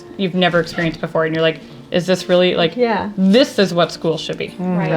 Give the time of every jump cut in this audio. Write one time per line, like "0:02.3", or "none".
none